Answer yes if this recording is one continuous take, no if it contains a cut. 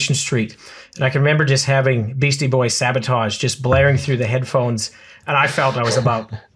yes